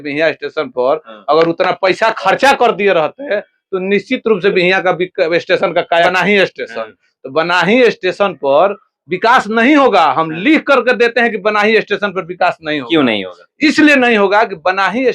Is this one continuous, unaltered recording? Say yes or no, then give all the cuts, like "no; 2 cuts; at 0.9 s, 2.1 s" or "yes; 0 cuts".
no; 1 cut; at 6.1 s